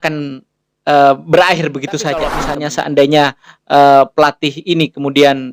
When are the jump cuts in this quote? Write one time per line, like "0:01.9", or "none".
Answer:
0:02.4